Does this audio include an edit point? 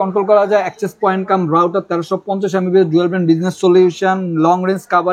no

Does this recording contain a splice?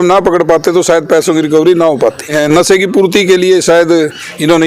yes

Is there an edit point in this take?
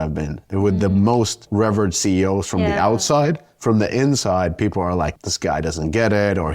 yes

